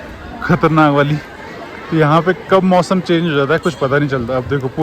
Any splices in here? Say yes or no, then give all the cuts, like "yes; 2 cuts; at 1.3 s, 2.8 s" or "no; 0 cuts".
no; 0 cuts